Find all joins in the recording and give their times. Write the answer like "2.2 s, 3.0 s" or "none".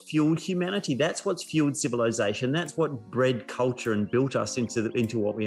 none